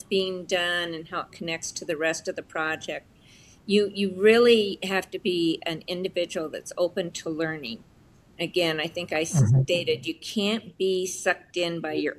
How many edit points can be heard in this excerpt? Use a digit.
0